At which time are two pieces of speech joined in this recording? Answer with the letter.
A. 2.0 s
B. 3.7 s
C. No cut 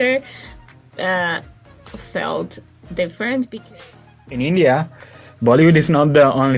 B